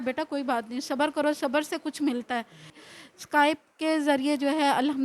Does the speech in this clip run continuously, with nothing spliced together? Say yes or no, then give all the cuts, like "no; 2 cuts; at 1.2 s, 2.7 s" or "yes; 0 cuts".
no; 1 cut; at 2.8 s